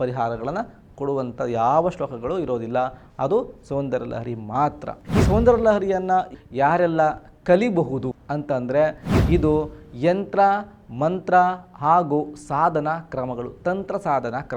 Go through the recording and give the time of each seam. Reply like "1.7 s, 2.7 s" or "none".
9.2 s

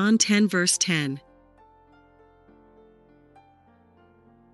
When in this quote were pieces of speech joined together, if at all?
none

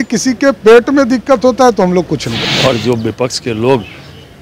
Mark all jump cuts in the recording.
2.3 s

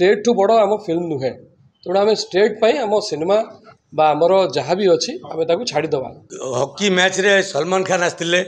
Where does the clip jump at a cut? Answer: 6.3 s

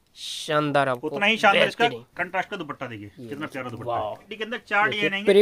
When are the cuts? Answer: 4.3 s

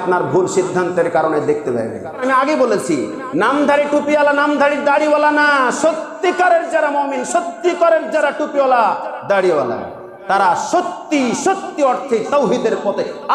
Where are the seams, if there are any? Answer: 2.2 s

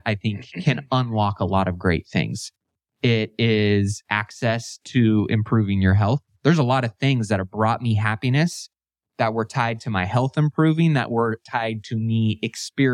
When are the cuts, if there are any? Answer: none

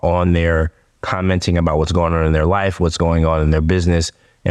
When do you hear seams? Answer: none

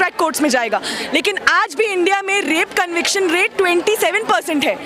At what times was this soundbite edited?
none

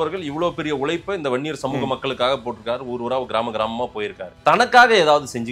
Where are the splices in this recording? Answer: 4.2 s

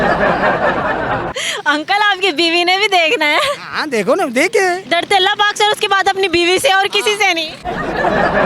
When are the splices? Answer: 1.3 s, 4.8 s

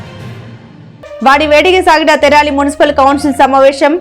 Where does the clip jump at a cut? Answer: 1.1 s

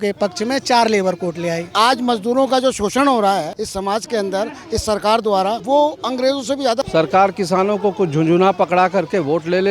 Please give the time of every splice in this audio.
1.7 s, 6.9 s

